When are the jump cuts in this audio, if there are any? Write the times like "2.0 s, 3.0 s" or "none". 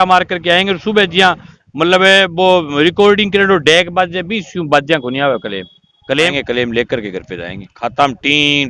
6.3 s